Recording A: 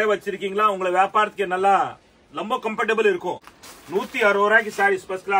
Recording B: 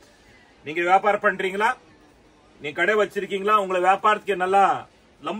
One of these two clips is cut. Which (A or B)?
A